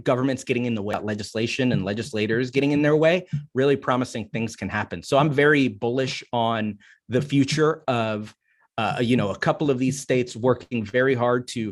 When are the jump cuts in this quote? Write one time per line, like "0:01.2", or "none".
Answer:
0:00.9